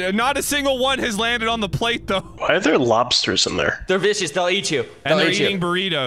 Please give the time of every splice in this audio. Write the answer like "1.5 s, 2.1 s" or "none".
2.3 s